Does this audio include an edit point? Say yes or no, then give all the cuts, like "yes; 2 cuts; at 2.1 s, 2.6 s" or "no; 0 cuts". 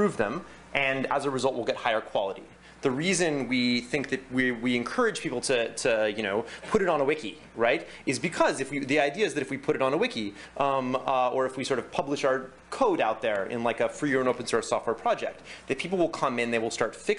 no; 0 cuts